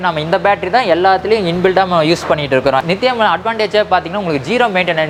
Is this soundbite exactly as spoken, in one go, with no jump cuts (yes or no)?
yes